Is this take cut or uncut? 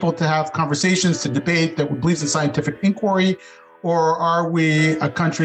uncut